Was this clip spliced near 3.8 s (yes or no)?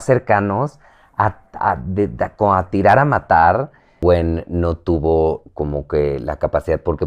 yes